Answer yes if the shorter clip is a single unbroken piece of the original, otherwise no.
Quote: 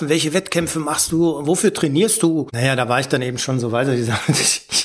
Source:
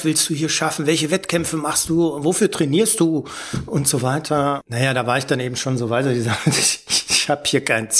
no